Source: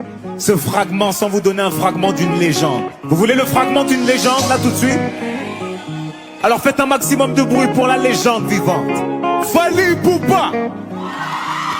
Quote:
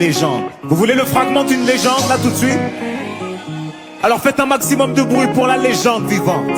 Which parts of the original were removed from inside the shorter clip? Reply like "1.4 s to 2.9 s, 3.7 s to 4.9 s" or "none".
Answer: none